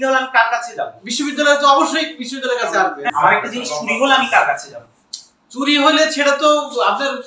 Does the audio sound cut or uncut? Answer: cut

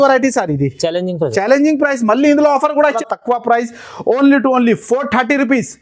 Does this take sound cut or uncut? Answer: cut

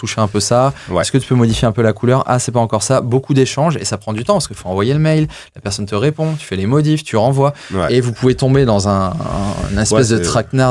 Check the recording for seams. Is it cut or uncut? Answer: uncut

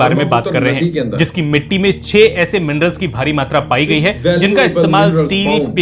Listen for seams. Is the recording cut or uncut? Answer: uncut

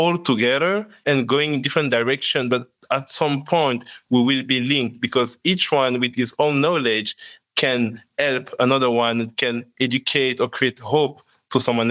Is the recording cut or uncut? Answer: cut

